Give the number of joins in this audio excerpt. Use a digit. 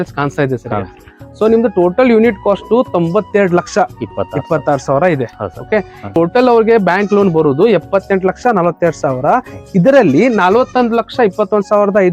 1